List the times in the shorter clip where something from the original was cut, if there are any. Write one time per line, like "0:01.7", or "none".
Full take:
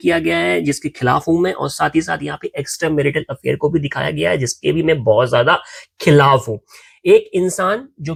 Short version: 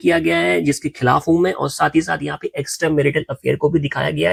none